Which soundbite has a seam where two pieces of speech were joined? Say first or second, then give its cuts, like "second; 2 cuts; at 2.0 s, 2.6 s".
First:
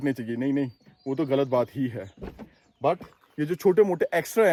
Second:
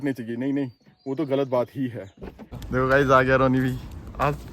second; 1 cut; at 2.6 s